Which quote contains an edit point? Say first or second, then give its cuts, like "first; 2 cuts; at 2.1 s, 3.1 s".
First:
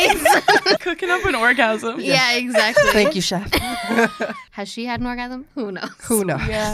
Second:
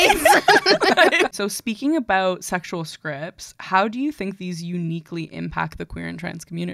first; 2 cuts; at 0.8 s, 4.4 s